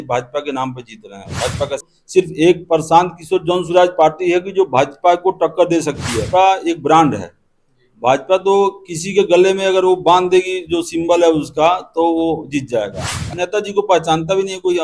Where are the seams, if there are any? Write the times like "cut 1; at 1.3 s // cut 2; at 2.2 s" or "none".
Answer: cut 1; at 1.9 s // cut 2; at 6.2 s // cut 3; at 13.2 s